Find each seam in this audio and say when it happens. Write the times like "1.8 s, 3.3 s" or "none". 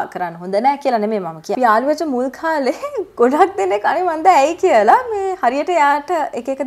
1.5 s